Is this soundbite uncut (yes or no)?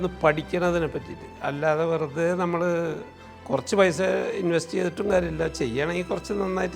yes